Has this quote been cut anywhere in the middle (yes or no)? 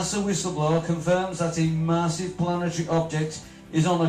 yes